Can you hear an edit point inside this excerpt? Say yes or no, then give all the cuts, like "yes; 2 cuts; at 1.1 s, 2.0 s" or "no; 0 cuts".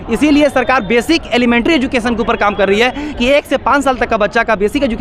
no; 0 cuts